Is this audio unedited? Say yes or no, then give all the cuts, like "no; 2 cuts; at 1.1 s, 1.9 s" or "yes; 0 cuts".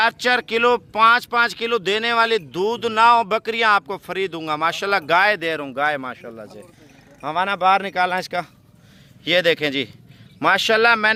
yes; 0 cuts